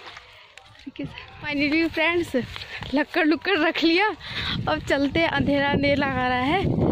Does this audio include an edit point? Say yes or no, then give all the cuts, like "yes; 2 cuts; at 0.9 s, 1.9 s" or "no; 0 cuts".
yes; 1 cut; at 1.5 s